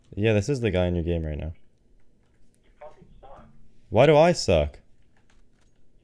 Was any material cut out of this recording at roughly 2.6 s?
no; 0 cuts

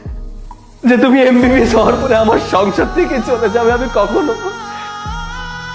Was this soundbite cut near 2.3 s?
no; 0 cuts

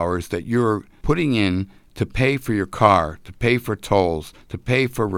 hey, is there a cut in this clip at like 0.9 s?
yes; 1 cut; at 0.9 s

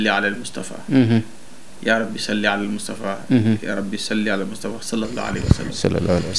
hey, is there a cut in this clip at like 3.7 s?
no; 0 cuts

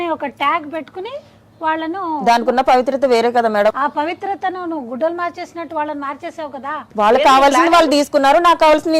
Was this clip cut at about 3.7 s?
yes; 2 cuts; at 3.7 s, 6.8 s

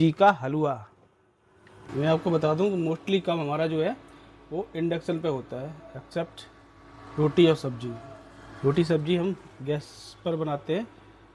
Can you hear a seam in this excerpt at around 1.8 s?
yes; 1 cut; at 1.8 s

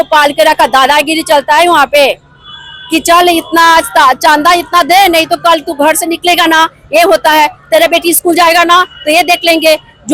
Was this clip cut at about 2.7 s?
no; 0 cuts

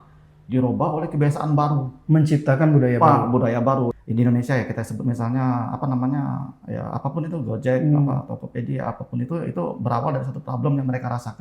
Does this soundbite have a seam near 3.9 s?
yes; 1 cut; at 3.9 s

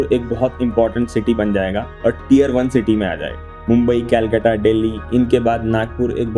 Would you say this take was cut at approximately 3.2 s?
no; 0 cuts

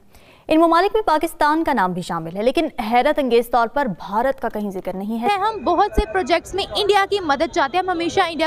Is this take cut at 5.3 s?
yes; 1 cut; at 5.3 s

